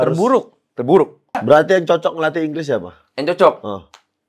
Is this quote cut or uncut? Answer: cut